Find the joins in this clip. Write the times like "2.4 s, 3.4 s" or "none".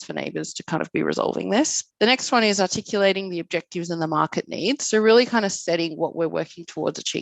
none